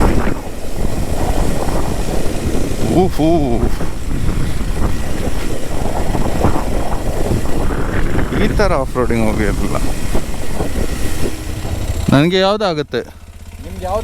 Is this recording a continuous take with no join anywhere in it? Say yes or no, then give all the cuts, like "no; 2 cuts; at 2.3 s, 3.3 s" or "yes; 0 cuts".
no; 1 cut; at 11.6 s